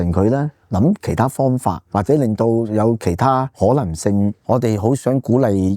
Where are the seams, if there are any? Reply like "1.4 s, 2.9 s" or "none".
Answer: 1.8 s, 3.5 s, 4.4 s